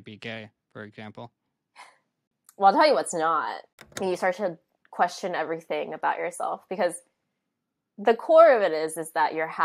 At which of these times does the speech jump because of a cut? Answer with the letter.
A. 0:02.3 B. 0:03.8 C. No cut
B